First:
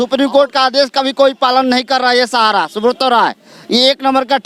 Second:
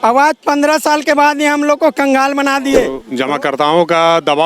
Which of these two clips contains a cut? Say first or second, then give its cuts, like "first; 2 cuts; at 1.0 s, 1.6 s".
second; 1 cut; at 3.0 s